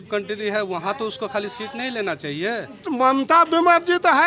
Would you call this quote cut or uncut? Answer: cut